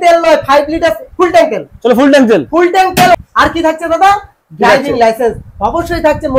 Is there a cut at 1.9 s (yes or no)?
no